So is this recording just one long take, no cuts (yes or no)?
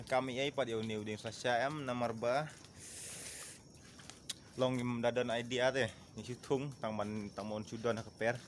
yes